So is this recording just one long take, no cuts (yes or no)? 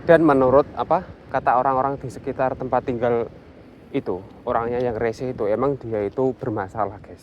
no